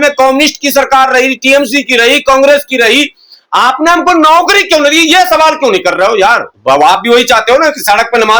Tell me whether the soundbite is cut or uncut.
cut